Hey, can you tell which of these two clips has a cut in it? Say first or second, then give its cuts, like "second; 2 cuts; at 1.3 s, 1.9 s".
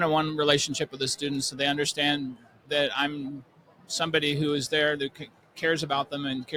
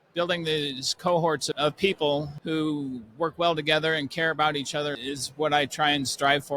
second; 3 cuts; at 1.5 s, 2.3 s, 5.0 s